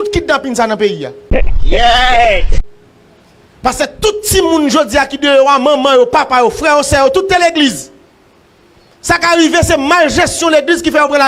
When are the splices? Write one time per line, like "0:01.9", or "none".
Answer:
0:01.1
0:03.3